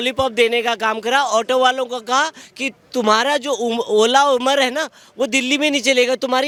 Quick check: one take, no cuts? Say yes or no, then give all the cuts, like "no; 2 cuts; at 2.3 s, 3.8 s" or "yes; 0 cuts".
yes; 0 cuts